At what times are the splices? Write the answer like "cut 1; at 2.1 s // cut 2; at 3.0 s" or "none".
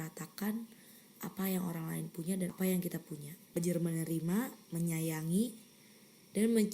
cut 1; at 2.5 s // cut 2; at 3.6 s

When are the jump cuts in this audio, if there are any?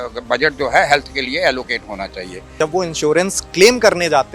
cut 1; at 2.6 s

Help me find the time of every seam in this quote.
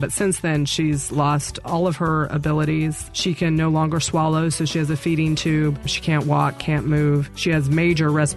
cut 1; at 3.1 s // cut 2; at 5.9 s // cut 3; at 7.3 s

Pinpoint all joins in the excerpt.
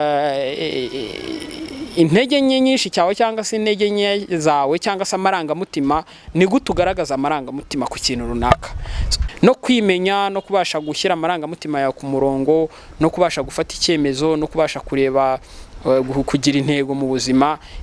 cut 1; at 9.1 s

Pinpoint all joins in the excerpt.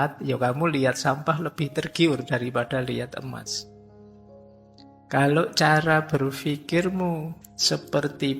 cut 1; at 7.4 s

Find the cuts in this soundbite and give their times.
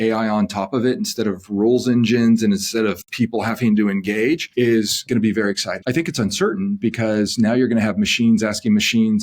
cut 1; at 4.9 s // cut 2; at 5.8 s

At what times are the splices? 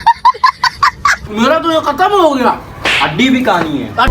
cut 1; at 1.2 s

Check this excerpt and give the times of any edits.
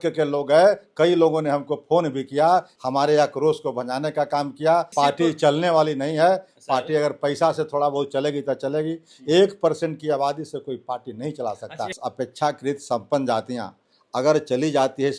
cut 1; at 2.7 s // cut 2; at 4.9 s // cut 3; at 12.0 s

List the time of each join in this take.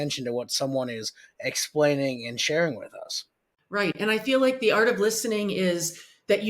cut 1; at 4.0 s

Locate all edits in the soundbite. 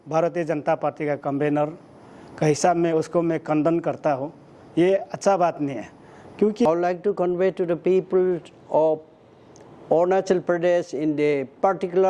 cut 1; at 6.7 s

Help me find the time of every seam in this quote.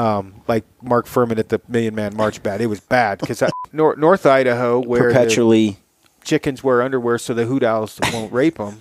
cut 1; at 3.7 s

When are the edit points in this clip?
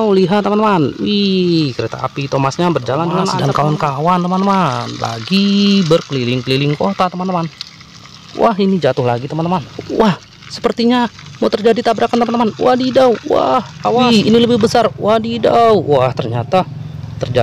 cut 1; at 3.4 s // cut 2; at 9.7 s // cut 3; at 14.0 s

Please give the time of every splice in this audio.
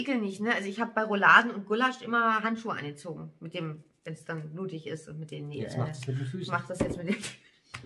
none

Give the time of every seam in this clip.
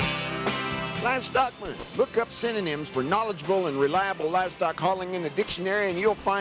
cut 1; at 1.0 s

